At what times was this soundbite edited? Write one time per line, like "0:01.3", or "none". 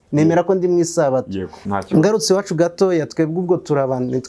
0:01.6